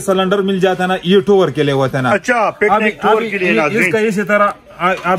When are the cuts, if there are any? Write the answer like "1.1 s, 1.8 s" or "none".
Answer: none